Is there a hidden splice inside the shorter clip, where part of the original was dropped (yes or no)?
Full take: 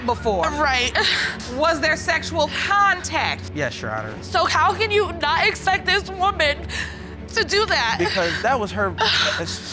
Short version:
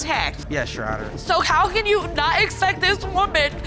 no